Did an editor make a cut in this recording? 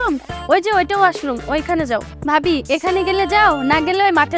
yes; 1 cut; at 2.1 s

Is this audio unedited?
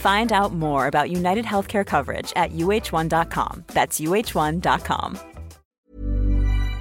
no; 1 cut; at 5.7 s

